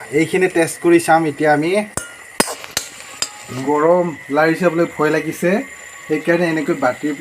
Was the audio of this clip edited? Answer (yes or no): yes